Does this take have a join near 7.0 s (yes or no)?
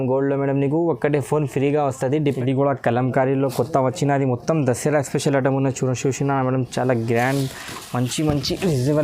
no